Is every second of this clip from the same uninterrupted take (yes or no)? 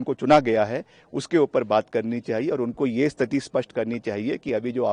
yes